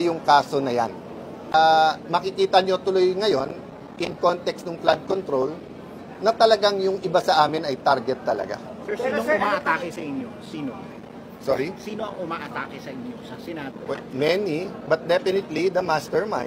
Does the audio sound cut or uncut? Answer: cut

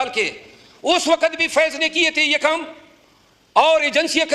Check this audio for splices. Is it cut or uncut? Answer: uncut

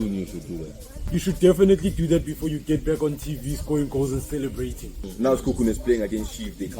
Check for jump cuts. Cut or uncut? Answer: cut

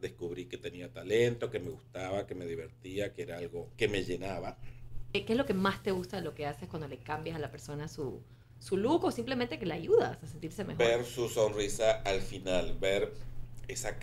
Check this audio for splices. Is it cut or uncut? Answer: cut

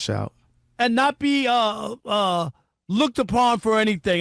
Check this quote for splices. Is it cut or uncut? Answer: uncut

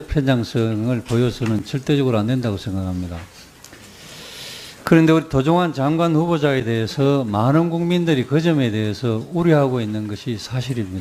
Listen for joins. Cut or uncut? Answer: cut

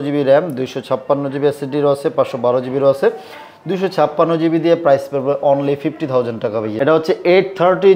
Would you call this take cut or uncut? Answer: cut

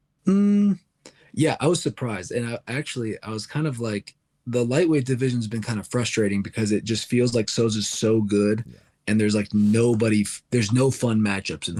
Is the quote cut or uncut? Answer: uncut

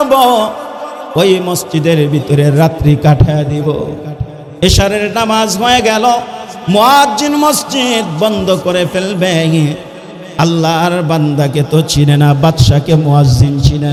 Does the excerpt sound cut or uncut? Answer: uncut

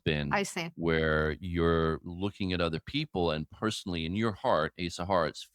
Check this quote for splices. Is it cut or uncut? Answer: uncut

